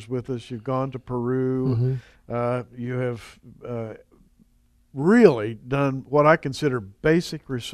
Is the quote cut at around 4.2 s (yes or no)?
yes